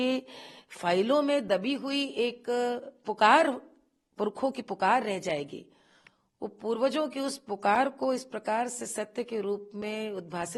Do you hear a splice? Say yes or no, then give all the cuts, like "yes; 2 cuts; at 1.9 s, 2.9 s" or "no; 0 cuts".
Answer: no; 0 cuts